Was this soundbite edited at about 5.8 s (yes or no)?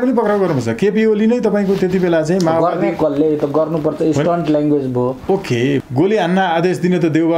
yes